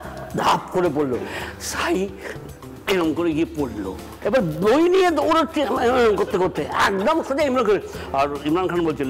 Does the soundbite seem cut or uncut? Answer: cut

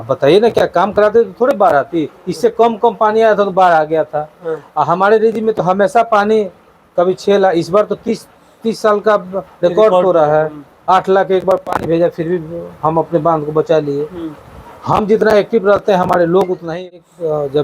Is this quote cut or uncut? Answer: cut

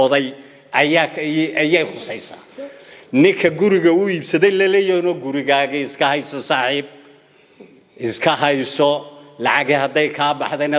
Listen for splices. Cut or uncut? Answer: uncut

